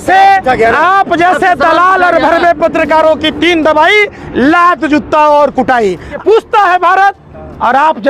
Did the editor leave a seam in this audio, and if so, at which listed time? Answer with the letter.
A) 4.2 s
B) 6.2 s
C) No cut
B